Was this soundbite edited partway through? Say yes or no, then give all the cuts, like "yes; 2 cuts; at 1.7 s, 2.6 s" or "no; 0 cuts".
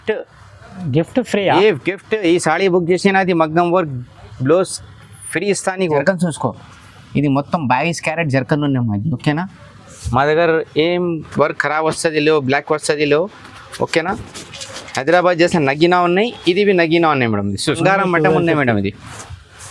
yes; 2 cuts; at 6.0 s, 17.8 s